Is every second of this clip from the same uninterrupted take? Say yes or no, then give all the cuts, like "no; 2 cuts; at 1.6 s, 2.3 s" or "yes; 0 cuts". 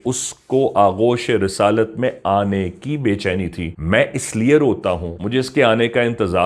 no; 2 cuts; at 3.7 s, 5.1 s